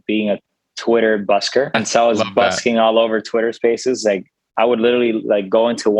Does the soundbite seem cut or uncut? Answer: cut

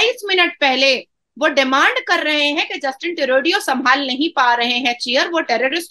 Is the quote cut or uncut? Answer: uncut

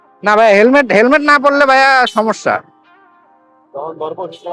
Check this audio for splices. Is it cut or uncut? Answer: uncut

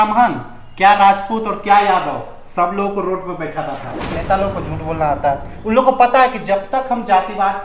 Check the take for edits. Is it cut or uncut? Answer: cut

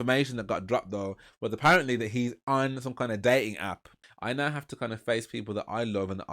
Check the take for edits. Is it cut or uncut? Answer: cut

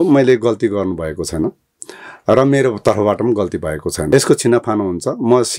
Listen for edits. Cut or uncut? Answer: uncut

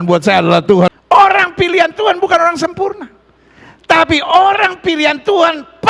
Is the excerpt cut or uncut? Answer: cut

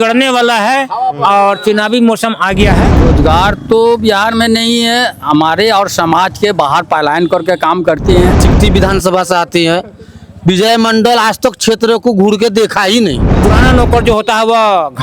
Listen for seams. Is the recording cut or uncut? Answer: cut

